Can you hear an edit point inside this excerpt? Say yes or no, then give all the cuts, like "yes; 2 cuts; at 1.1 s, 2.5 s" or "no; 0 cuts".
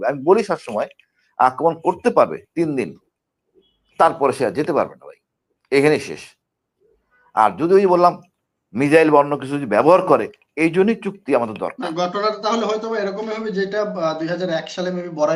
no; 0 cuts